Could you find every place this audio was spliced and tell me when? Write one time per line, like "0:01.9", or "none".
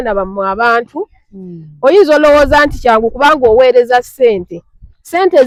none